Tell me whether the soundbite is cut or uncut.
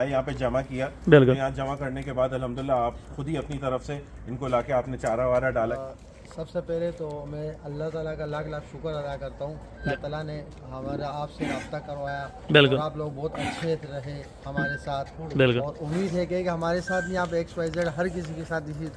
cut